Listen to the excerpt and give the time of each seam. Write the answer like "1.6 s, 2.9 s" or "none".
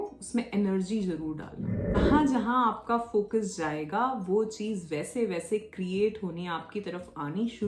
2.0 s